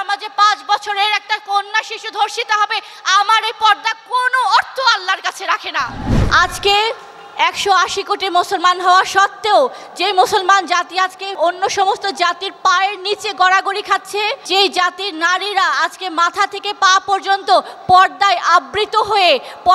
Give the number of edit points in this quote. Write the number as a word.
two